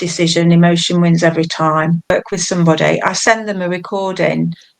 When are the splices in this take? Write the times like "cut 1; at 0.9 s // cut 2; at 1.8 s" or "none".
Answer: cut 1; at 2.1 s